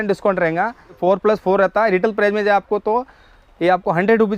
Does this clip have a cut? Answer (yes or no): yes